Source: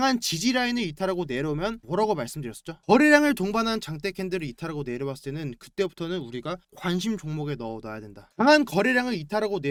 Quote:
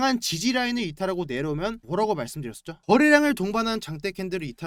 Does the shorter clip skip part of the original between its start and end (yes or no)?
no